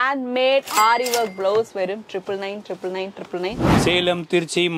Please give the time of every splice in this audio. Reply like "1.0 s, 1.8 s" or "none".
3.7 s

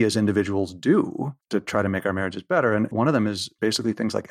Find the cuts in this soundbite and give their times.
1.4 s, 2.9 s

